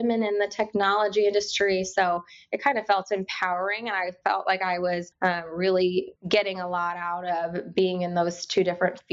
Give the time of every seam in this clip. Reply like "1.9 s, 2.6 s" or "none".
5.1 s, 6.2 s